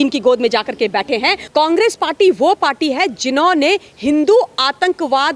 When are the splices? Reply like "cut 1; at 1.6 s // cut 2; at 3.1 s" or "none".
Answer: cut 1; at 1.4 s